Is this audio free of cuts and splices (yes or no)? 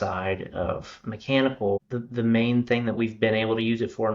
no